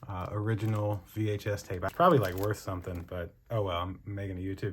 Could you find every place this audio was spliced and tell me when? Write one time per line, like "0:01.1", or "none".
0:01.9